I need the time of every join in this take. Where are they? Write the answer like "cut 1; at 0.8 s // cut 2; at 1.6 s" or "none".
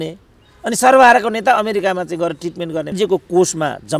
cut 1; at 3.0 s

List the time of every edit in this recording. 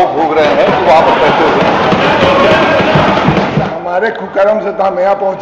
cut 1; at 3.7 s

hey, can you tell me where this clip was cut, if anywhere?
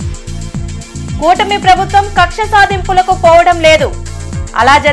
none

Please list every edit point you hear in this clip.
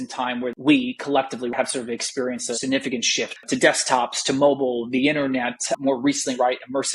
cut 1; at 1.5 s // cut 2; at 2.6 s // cut 3; at 3.4 s

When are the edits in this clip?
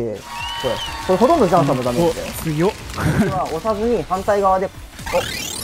cut 1; at 3.5 s

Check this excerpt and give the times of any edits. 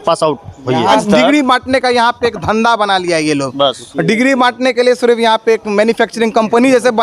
cut 1; at 1.0 s

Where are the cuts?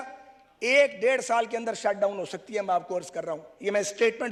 none

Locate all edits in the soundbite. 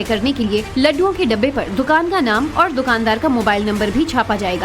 cut 1; at 2.3 s

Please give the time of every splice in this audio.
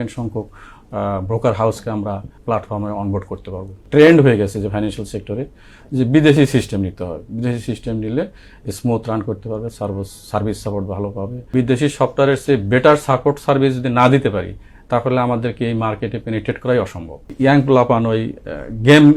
cut 1; at 2.3 s // cut 2; at 3.9 s // cut 3; at 11.5 s // cut 4; at 17.3 s

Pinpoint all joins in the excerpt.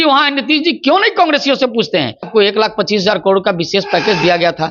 cut 1; at 2.3 s

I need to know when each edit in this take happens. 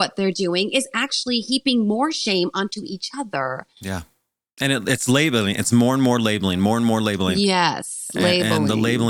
cut 1; at 4.5 s

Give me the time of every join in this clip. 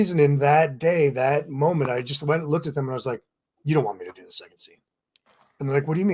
none

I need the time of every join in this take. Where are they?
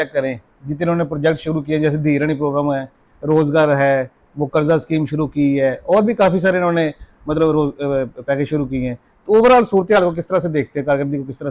none

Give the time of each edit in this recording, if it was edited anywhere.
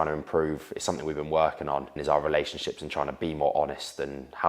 cut 1; at 2.0 s

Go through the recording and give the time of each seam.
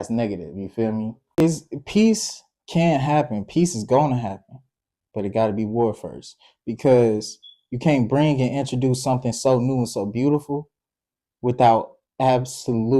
cut 1; at 1.4 s

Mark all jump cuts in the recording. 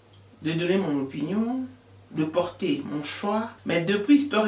cut 1; at 3.5 s

